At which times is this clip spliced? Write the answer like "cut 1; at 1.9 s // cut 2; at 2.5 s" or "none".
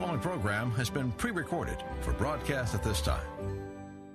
none